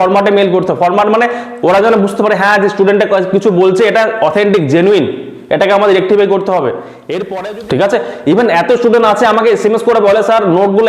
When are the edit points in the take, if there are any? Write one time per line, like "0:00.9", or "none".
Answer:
0:07.2